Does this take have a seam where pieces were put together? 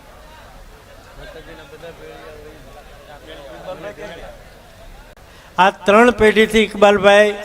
yes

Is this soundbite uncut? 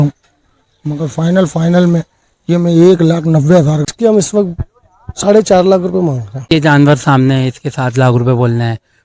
no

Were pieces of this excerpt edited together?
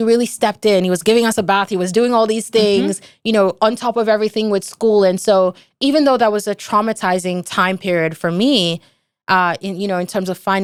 no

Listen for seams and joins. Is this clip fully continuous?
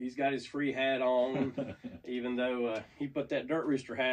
yes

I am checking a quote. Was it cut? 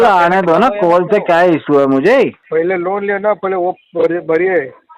yes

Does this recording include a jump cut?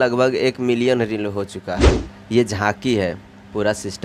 yes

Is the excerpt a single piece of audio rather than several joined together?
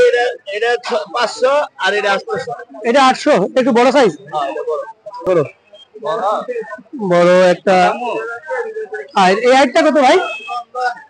no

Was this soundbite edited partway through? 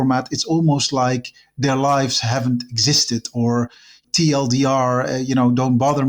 yes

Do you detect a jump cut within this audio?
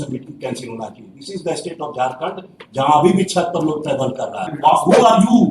yes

